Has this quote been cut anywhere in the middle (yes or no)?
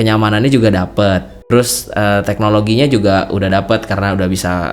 yes